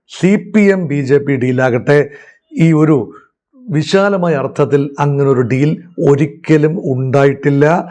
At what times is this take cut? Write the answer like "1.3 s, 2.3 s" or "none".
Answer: none